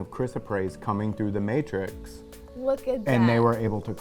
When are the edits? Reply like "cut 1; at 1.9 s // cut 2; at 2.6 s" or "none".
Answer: none